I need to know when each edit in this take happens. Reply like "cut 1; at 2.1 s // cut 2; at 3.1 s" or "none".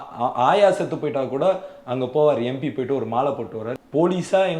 cut 1; at 3.6 s